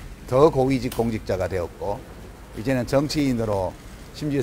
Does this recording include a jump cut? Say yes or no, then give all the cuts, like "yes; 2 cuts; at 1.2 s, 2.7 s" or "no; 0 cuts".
no; 0 cuts